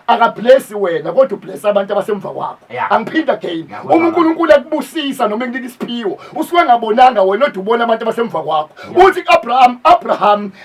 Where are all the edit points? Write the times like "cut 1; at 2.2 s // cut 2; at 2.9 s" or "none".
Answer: none